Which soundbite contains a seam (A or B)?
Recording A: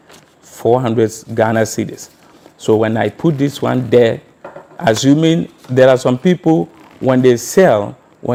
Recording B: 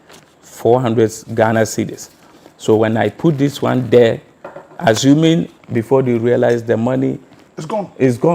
B